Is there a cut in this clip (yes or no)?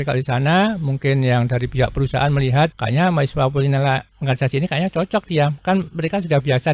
yes